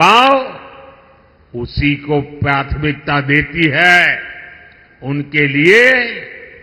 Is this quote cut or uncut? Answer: uncut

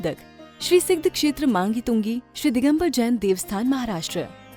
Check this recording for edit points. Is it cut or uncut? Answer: uncut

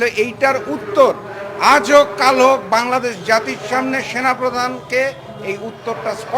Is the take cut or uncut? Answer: uncut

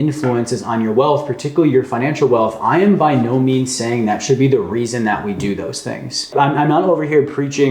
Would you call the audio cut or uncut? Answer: cut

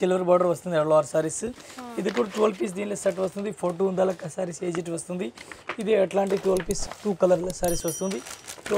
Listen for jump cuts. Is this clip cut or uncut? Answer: uncut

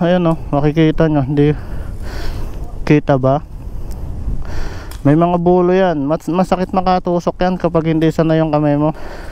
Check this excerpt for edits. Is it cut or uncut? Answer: uncut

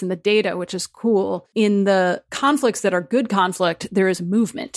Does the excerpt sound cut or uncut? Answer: cut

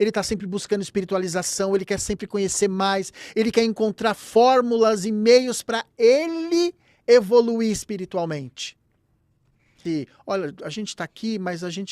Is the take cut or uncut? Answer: cut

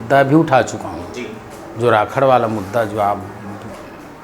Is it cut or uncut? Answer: uncut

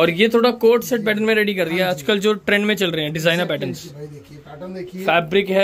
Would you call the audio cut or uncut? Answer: uncut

